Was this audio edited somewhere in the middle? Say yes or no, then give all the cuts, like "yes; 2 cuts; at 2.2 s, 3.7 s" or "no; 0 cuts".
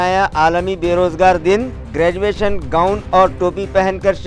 no; 0 cuts